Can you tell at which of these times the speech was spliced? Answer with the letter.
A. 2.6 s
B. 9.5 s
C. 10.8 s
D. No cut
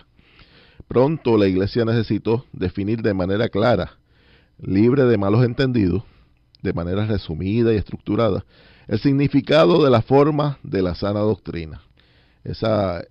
D